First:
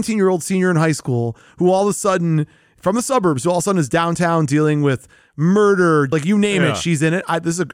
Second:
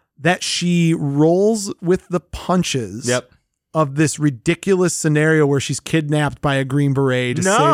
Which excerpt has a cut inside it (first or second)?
first